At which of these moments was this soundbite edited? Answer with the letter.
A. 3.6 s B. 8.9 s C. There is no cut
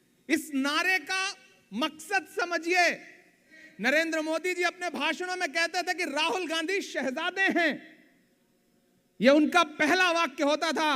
A